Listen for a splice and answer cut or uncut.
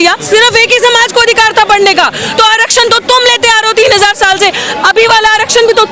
uncut